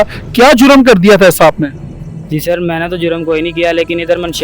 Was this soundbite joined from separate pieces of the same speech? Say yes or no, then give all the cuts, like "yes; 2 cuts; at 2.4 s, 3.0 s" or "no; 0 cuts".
no; 0 cuts